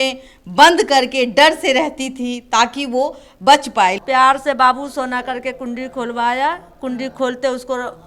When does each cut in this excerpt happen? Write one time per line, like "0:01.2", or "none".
0:04.0